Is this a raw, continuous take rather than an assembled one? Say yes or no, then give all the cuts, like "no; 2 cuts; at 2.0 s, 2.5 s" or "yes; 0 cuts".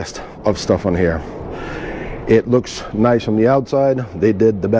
yes; 0 cuts